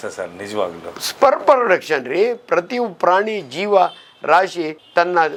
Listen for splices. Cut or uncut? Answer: uncut